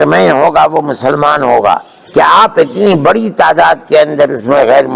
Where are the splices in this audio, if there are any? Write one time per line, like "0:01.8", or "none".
0:01.9